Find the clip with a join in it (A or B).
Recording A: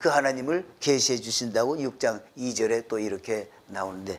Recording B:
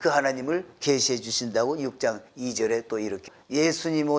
B